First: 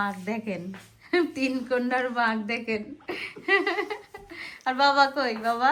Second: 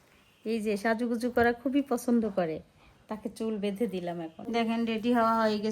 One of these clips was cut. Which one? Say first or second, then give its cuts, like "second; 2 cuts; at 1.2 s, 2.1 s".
second; 1 cut; at 4.5 s